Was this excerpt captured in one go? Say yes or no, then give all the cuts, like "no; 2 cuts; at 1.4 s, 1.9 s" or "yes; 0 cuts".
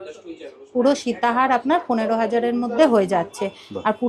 yes; 0 cuts